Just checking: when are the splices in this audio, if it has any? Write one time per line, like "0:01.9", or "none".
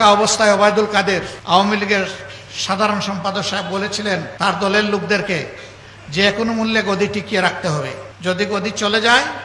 0:01.3
0:04.3
0:08.0